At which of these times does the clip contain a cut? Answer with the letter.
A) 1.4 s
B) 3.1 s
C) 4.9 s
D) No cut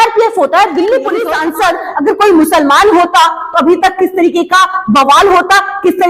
A